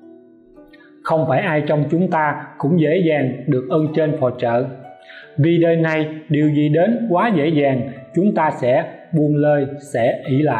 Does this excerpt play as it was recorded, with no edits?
no; 1 cut; at 1.0 s

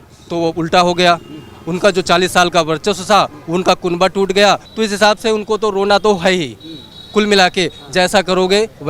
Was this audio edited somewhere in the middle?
yes; 1 cut; at 4.7 s

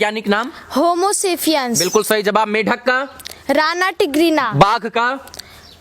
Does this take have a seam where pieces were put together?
no; 0 cuts

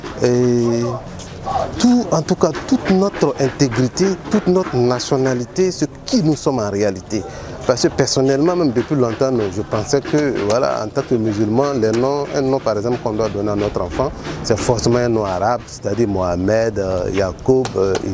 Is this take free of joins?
yes; 0 cuts

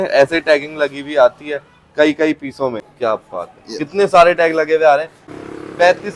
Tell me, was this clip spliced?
yes; 2 cuts; at 2.8 s, 5.2 s

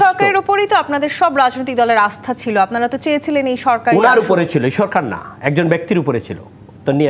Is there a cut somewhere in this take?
no; 0 cuts

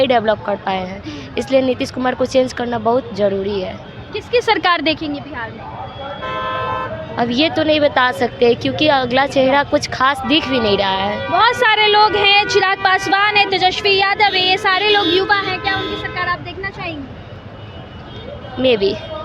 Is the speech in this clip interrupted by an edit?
no; 0 cuts

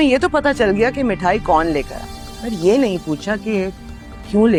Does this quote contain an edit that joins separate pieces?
no; 0 cuts

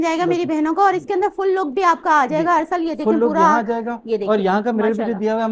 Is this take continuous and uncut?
yes; 0 cuts

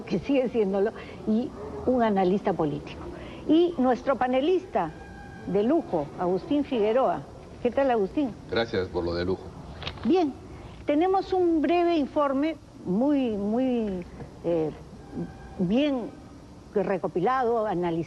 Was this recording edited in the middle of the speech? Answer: yes; 1 cut; at 11.7 s

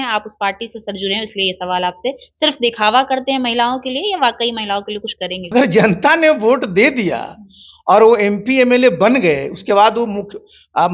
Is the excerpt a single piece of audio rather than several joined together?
no; 1 cut; at 5.4 s

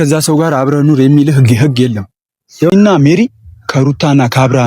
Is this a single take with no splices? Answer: no; 1 cut; at 2.7 s

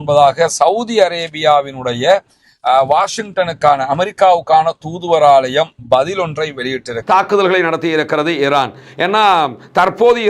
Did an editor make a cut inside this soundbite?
yes; 2 cuts; at 6.9 s, 9.1 s

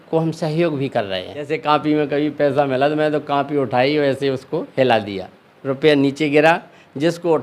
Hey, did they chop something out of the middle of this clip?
yes; 1 cut; at 1.6 s

